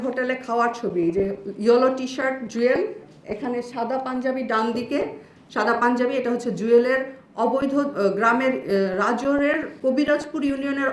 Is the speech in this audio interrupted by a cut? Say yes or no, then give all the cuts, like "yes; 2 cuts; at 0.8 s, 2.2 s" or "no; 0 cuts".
no; 0 cuts